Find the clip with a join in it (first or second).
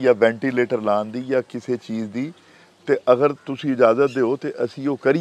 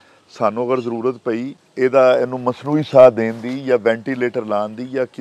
second